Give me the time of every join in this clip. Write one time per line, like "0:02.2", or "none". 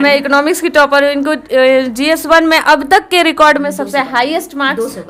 none